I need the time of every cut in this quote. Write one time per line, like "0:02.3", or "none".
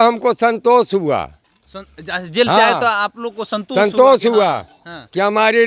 none